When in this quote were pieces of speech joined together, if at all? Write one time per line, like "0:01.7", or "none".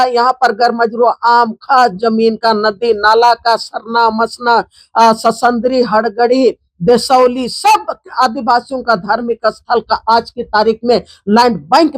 none